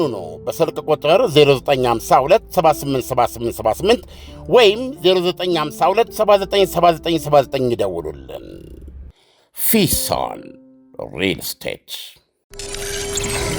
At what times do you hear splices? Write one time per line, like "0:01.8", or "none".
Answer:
0:12.5